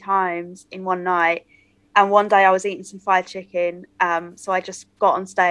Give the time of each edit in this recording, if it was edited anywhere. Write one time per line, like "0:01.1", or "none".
none